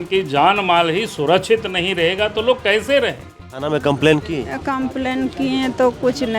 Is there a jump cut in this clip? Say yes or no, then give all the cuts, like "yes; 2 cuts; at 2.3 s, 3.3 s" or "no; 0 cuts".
yes; 1 cut; at 3.6 s